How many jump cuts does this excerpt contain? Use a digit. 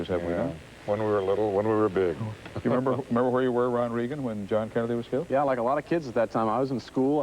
1